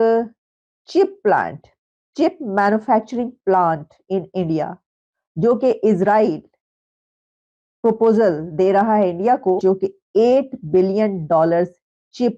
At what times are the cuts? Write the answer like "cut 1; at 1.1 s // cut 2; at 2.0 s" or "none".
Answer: cut 1; at 9.6 s